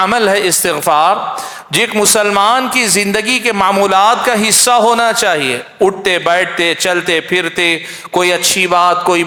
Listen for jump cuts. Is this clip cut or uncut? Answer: uncut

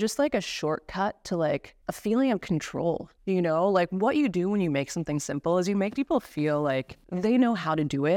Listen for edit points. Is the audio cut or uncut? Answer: uncut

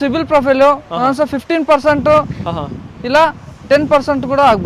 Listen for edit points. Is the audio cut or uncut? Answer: uncut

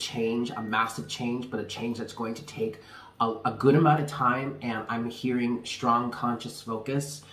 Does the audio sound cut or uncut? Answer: uncut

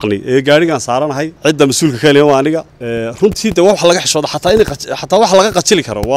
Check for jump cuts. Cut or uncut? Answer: cut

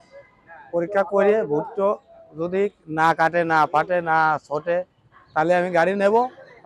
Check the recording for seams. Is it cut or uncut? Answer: uncut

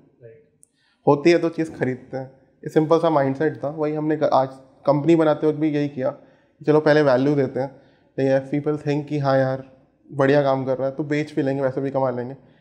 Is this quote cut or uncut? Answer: uncut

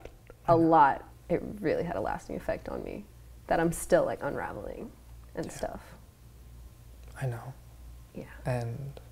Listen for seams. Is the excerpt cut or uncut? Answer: cut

